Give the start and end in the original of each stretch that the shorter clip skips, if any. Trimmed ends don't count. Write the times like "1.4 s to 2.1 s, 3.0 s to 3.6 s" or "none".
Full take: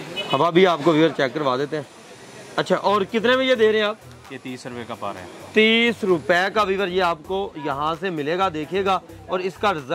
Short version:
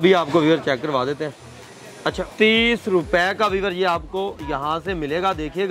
2.7 s to 5.3 s